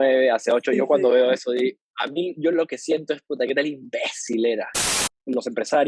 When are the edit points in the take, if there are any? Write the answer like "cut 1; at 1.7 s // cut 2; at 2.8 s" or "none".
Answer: cut 1; at 4.8 s

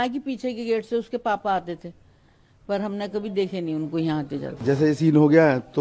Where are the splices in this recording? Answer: cut 1; at 4.6 s

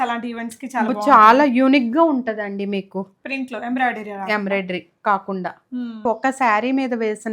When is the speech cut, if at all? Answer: cut 1; at 6.0 s

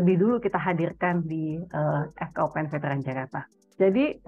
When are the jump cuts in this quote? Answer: none

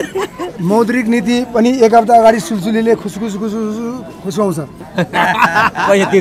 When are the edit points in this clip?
cut 1; at 4.8 s

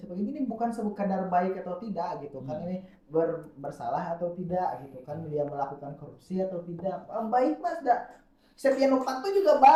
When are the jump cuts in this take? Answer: none

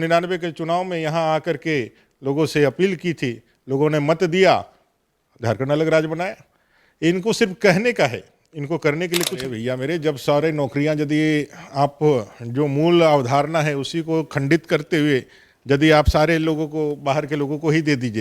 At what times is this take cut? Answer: cut 1; at 9.4 s

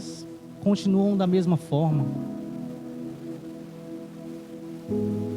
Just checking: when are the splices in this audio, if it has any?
none

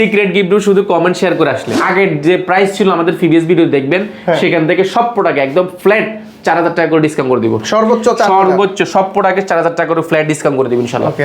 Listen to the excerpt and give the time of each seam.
cut 1; at 1.7 s

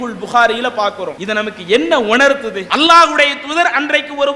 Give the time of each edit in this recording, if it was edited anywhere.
cut 1; at 1.1 s // cut 2; at 2.6 s

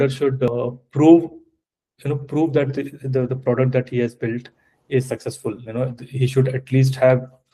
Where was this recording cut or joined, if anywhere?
none

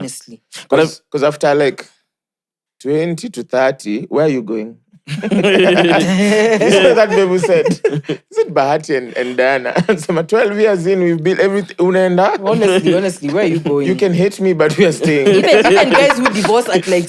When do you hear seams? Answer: none

